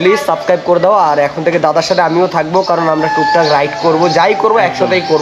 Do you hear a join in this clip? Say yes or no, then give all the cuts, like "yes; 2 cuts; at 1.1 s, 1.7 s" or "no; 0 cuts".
no; 0 cuts